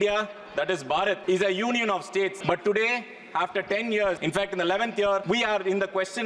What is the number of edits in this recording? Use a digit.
4